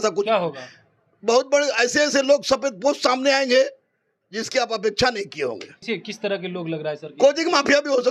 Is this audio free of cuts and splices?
no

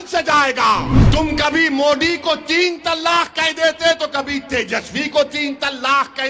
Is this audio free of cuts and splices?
no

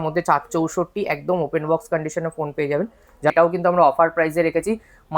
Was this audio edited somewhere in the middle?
yes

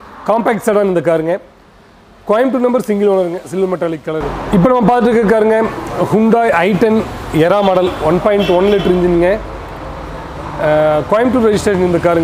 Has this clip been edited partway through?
yes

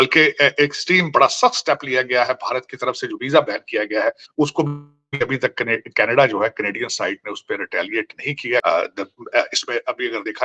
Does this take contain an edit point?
yes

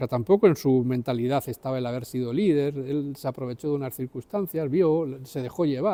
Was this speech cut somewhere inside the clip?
no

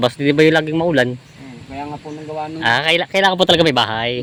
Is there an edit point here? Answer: no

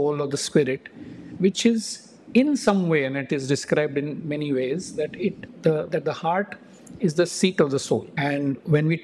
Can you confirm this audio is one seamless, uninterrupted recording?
no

